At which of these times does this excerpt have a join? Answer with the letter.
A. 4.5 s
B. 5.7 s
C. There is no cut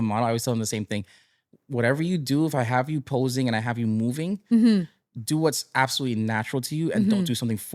C